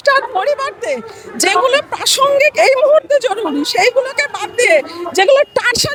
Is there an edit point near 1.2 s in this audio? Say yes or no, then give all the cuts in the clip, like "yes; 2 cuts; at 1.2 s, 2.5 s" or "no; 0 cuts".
no; 0 cuts